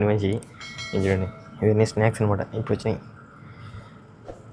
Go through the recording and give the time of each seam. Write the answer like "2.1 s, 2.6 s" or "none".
none